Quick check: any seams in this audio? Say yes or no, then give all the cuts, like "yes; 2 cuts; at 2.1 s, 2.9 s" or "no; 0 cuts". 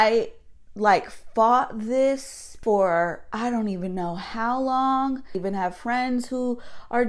yes; 1 cut; at 5.4 s